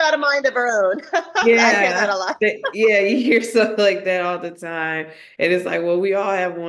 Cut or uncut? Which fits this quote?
uncut